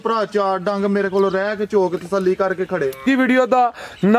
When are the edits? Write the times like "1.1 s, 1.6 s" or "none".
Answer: 3.0 s